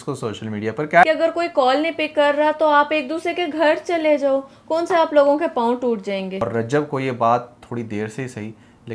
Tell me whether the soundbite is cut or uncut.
cut